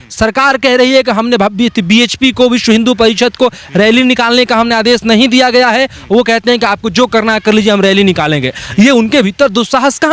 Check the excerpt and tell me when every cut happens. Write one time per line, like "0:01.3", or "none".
none